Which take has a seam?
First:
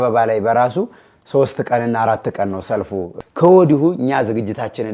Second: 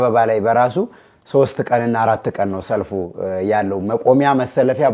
first; 1 cut; at 3.2 s

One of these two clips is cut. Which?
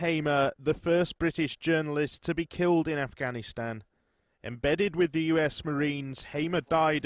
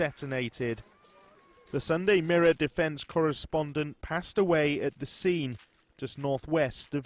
second; 1 cut; at 5.6 s

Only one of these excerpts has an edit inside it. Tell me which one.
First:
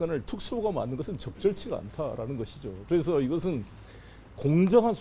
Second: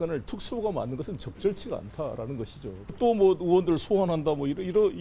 second; 1 cut; at 2.9 s

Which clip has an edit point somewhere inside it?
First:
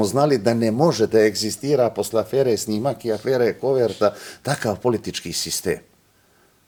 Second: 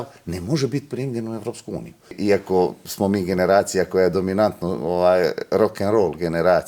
second; 1 cut; at 2.2 s

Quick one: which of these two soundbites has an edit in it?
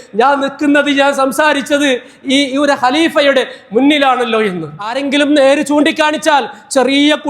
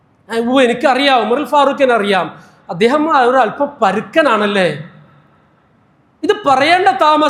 first; 1 cut; at 5.0 s

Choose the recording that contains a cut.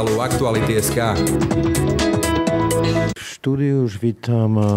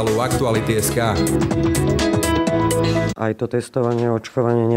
second; 1 cut; at 3.1 s

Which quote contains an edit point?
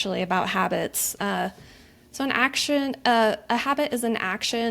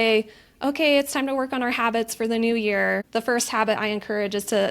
second; 1 cut; at 3.0 s

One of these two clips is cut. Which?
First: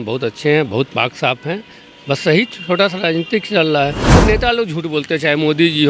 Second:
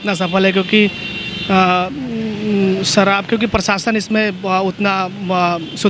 first; 1 cut; at 4.0 s

